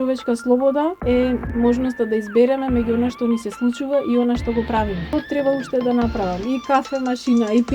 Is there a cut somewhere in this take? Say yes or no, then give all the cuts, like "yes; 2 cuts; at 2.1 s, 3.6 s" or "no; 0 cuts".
yes; 2 cuts; at 1.1 s, 5.1 s